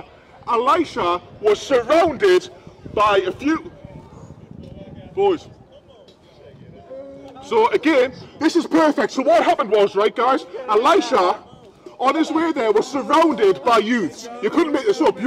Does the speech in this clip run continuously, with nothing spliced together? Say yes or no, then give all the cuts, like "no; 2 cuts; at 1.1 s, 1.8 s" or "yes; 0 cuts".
yes; 0 cuts